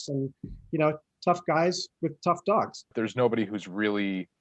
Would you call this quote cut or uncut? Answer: cut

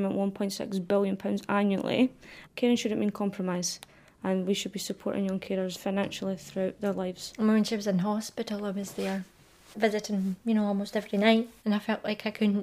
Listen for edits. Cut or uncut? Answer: cut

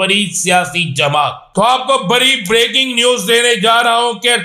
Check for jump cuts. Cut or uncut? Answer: cut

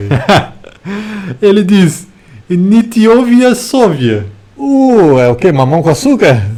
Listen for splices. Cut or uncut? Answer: uncut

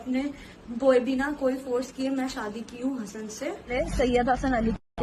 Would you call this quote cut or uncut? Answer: cut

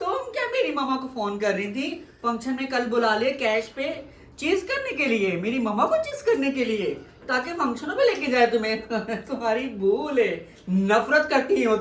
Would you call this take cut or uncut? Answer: uncut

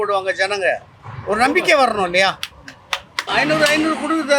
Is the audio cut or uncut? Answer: cut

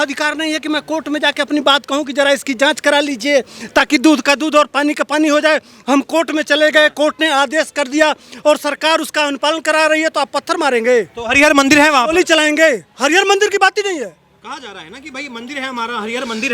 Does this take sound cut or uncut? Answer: uncut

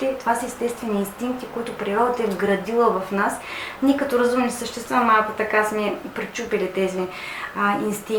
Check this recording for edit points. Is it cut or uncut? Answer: uncut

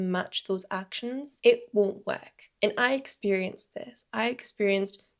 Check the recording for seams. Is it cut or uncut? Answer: uncut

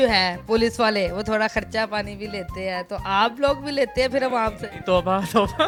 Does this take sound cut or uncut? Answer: uncut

